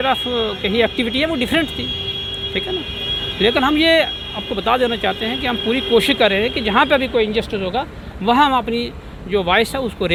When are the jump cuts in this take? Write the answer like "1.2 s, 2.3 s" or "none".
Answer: none